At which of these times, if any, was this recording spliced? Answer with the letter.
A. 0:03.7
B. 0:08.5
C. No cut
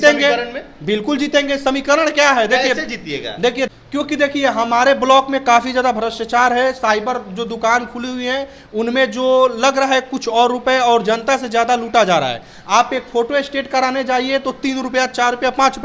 A